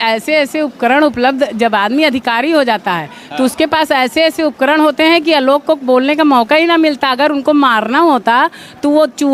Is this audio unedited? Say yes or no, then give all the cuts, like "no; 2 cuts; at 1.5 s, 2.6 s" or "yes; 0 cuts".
yes; 0 cuts